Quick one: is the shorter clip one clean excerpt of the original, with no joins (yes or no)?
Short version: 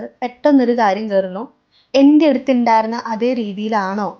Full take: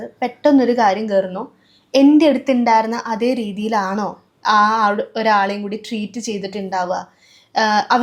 yes